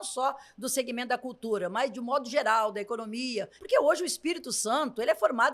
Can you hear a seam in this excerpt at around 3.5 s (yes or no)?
yes